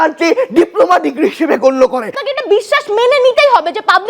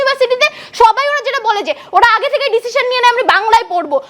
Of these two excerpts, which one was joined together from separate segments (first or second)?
first